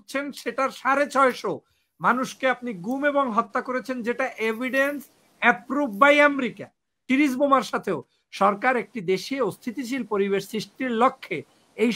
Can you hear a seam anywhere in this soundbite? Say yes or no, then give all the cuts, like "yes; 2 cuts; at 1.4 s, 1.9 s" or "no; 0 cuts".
yes; 1 cut; at 7.0 s